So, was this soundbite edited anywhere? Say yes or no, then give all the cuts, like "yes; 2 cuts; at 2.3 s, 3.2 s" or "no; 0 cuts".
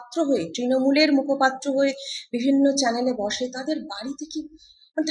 no; 0 cuts